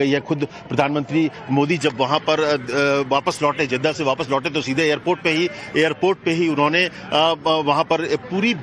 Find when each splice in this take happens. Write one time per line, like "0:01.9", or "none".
0:07.2